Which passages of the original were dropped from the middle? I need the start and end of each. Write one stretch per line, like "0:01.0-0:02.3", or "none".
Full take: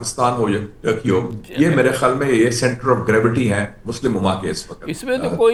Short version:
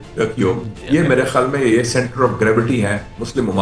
none